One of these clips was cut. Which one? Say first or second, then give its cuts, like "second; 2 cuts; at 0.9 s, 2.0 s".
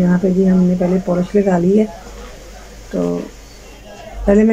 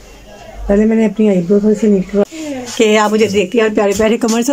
second; 1 cut; at 2.3 s